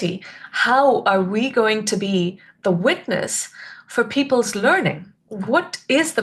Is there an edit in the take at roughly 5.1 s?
no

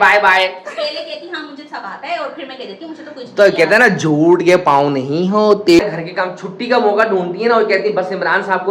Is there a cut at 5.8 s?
yes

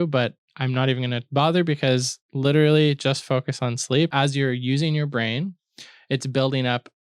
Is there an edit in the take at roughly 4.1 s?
yes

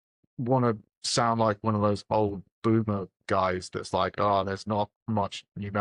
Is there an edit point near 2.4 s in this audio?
no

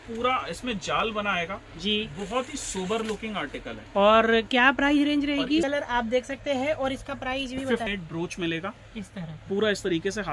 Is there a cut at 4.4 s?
no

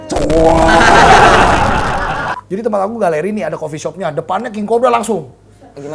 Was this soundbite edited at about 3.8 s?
no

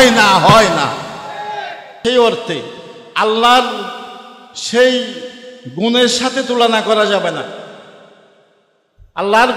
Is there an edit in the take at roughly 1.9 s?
yes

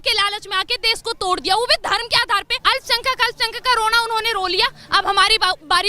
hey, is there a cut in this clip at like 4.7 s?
no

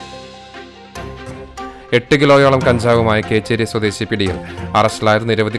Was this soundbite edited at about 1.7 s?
yes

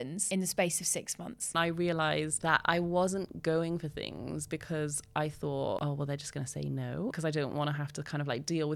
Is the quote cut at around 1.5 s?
yes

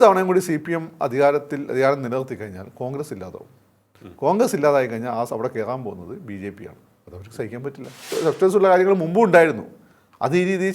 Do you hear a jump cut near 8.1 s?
yes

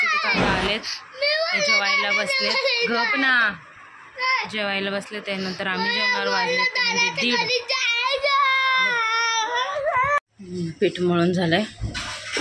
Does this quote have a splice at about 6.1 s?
no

